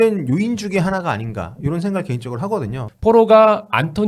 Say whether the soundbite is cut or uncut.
cut